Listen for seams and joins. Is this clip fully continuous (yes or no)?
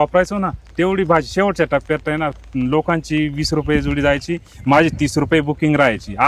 yes